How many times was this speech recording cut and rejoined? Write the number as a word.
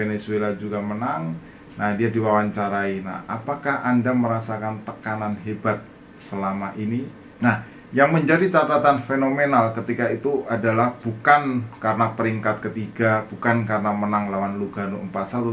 one